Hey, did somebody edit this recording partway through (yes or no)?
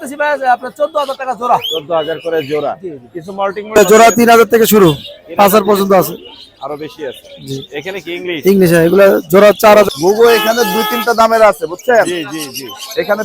yes